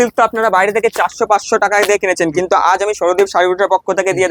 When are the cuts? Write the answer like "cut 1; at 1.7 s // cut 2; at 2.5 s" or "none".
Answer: none